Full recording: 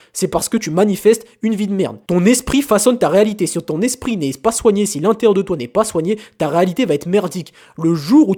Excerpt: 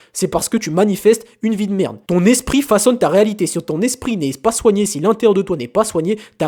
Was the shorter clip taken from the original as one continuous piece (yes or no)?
yes